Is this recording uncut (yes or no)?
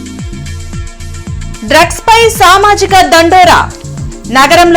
yes